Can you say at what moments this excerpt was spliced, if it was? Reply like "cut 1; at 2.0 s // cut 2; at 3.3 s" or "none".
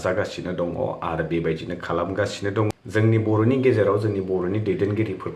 cut 1; at 2.7 s